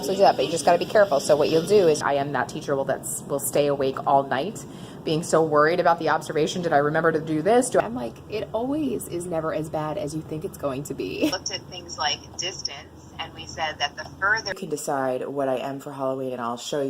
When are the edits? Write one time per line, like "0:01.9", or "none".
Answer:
0:02.0
0:07.8
0:11.4
0:14.5